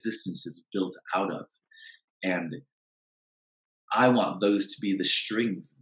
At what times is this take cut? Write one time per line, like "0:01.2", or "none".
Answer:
none